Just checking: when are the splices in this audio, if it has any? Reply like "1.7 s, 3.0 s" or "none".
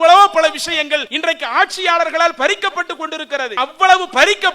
1.1 s, 3.6 s